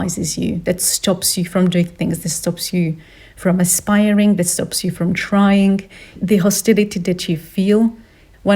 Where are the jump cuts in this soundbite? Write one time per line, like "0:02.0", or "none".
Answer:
0:06.1